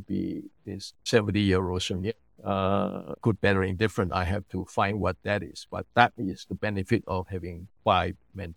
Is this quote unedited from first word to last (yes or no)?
yes